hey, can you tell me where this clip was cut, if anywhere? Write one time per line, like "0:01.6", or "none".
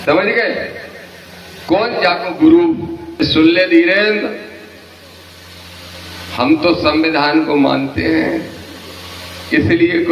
0:03.2